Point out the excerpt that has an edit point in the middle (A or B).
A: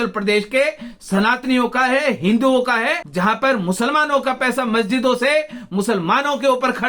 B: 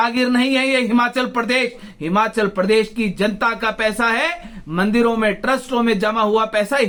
A